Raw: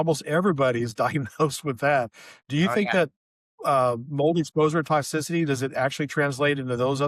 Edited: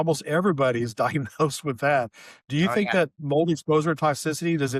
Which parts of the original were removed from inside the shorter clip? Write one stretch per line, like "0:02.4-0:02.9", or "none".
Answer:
0:03.2-0:04.1

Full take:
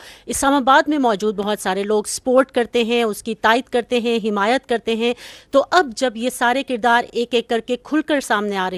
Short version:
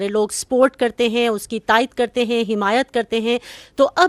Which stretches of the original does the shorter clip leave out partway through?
none

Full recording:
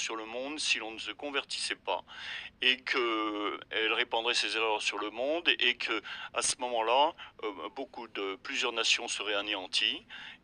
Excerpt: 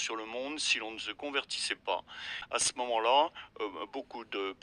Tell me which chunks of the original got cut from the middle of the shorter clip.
0:02.3-0:06.2

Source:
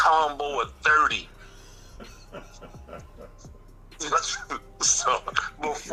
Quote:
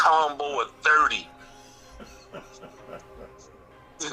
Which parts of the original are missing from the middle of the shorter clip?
none

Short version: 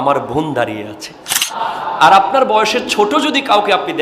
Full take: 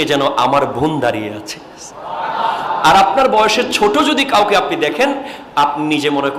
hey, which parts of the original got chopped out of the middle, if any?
0:02.0-0:02.3

